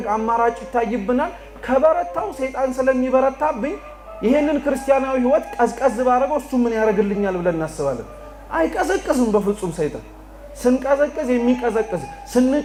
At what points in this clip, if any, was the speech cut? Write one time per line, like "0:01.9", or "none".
none